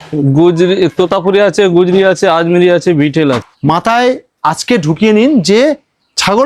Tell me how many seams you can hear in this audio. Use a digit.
1